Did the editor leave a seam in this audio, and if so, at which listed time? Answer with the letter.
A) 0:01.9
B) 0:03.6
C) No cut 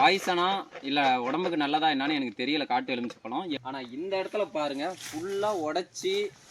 B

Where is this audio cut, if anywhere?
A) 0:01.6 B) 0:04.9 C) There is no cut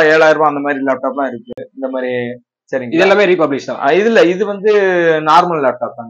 C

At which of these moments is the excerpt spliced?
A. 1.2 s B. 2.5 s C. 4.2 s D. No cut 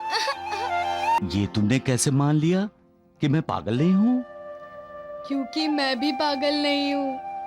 A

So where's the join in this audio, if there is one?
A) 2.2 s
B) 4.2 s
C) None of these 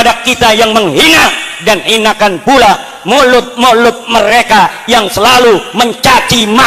C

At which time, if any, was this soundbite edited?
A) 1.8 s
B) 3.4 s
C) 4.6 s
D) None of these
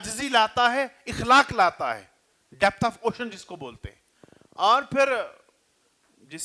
D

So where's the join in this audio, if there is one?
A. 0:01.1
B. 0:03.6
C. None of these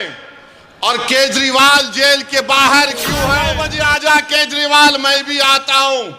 B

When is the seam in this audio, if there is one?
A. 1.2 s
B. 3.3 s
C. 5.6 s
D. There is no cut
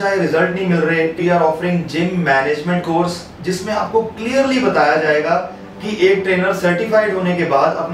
A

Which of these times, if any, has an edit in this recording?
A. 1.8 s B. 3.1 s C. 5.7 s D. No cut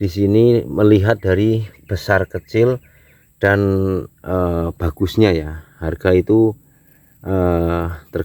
D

